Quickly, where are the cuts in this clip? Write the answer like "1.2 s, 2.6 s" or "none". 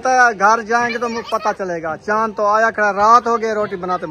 none